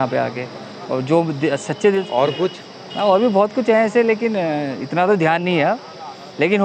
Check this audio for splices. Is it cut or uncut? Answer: cut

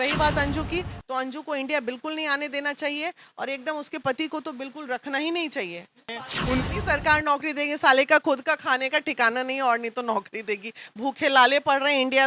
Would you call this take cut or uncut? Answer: cut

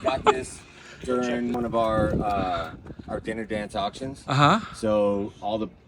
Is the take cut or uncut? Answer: cut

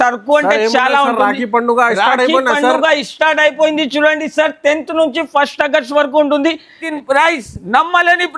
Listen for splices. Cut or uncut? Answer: cut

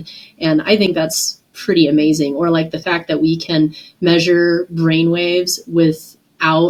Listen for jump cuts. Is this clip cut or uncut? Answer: uncut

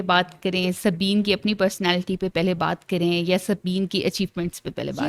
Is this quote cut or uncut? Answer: uncut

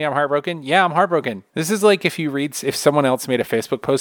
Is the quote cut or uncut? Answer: uncut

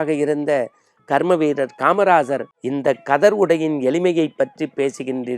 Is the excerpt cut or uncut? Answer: cut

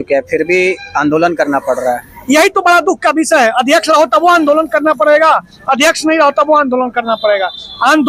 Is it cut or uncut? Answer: uncut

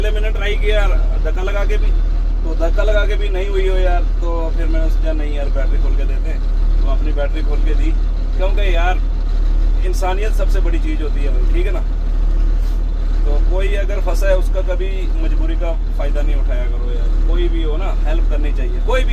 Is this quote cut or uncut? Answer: uncut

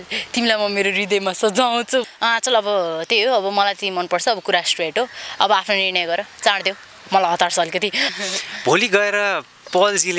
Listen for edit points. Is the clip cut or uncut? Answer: cut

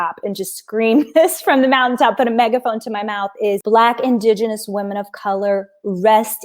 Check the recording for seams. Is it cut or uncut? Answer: cut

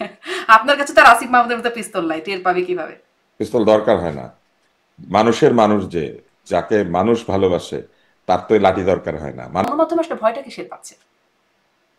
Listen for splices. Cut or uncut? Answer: cut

